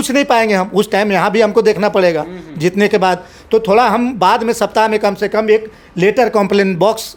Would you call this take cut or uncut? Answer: uncut